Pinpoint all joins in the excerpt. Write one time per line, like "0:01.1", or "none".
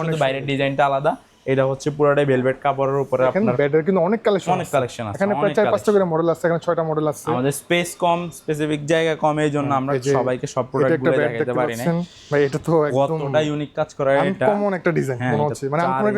0:03.3